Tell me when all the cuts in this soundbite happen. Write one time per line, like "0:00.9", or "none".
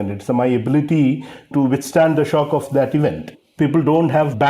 0:02.7